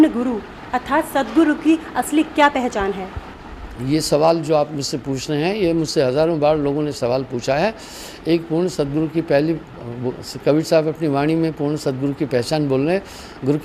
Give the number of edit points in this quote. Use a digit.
0